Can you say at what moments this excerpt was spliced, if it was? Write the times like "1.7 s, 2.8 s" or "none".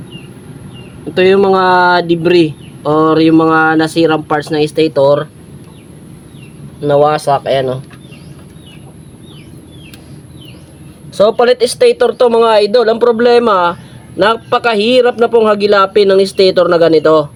none